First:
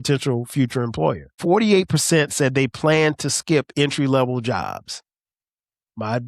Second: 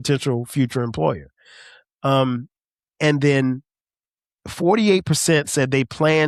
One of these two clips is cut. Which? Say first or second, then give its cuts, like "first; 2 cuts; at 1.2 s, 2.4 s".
first; 1 cut; at 1.3 s